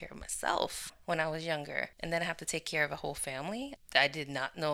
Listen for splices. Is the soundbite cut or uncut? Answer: cut